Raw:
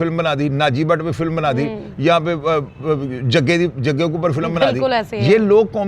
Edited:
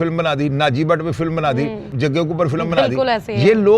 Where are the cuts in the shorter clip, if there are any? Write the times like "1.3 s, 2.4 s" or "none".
1.9 s